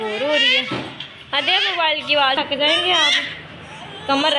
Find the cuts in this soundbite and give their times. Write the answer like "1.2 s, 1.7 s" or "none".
2.4 s